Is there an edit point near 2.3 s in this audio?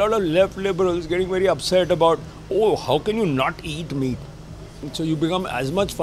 no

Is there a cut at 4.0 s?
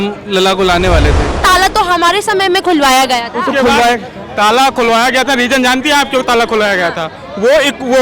no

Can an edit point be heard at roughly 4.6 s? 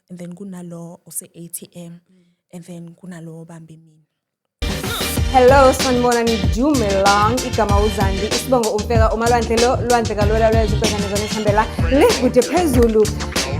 yes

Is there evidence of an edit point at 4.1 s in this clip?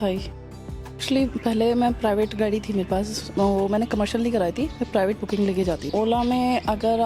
no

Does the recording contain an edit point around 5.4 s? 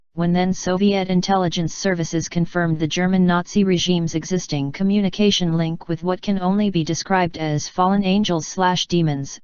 yes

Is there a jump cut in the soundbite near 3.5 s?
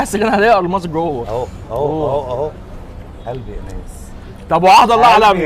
no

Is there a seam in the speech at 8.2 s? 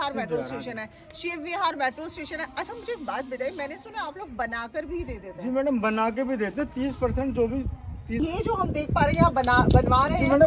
yes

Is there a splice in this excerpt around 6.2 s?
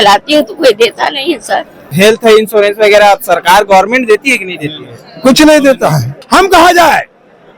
yes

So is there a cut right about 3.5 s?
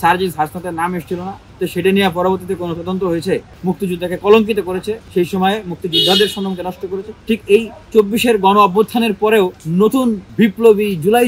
yes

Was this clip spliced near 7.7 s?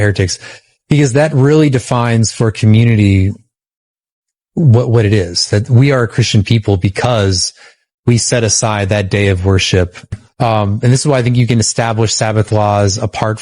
no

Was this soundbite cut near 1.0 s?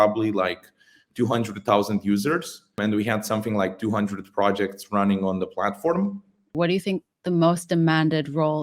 no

